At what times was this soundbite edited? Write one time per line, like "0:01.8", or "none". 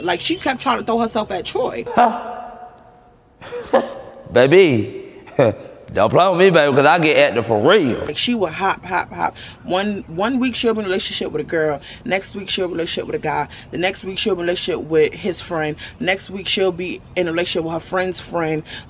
0:01.8
0:08.2